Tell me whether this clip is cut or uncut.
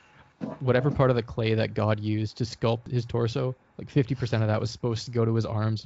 cut